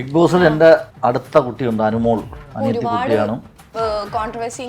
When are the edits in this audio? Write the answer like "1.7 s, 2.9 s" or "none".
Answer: 0.9 s, 2.4 s